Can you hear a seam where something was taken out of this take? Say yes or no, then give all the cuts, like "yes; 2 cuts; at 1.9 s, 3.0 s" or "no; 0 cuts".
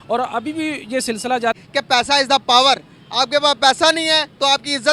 yes; 1 cut; at 1.6 s